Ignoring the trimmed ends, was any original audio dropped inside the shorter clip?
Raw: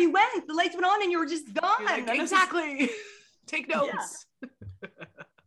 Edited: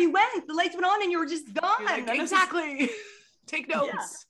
no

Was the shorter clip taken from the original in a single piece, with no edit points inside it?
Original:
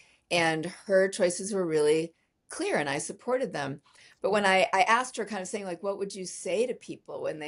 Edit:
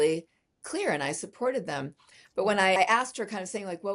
no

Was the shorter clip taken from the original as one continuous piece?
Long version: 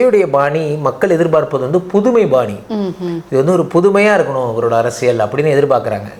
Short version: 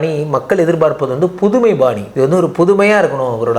no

